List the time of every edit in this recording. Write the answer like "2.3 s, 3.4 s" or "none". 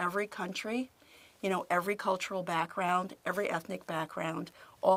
none